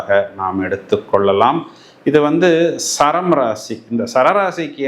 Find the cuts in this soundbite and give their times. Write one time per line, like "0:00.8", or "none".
none

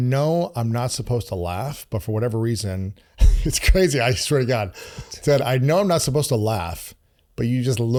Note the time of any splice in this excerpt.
none

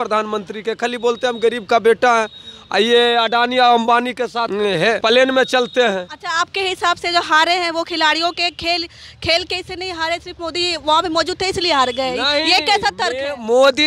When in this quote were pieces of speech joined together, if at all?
none

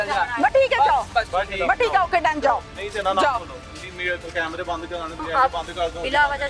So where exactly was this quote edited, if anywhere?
0:01.1
0:05.2

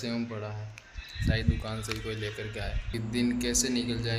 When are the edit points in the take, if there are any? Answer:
0:02.9

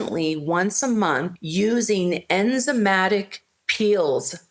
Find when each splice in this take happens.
0:01.4

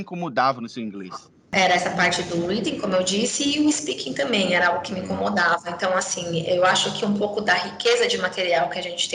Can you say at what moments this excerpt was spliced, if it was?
none

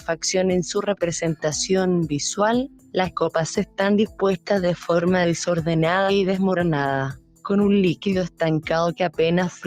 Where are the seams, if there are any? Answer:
none

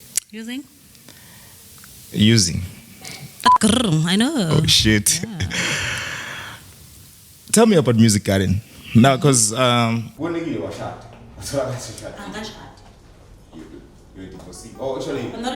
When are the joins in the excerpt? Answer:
0:03.5
0:10.1

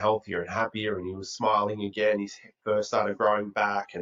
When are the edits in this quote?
none

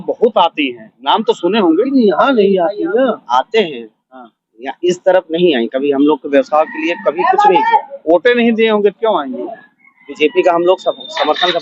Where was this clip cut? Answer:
0:03.2

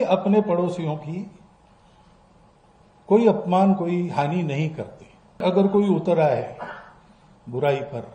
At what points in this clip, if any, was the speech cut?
0:05.4

